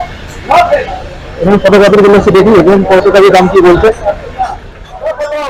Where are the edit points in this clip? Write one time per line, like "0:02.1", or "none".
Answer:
none